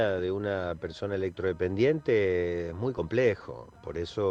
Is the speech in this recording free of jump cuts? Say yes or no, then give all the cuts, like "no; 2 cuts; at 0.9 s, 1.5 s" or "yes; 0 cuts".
yes; 0 cuts